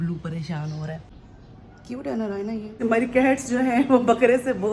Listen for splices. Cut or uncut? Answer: cut